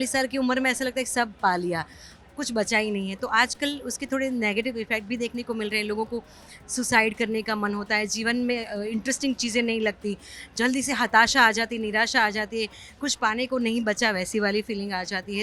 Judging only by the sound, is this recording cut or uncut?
uncut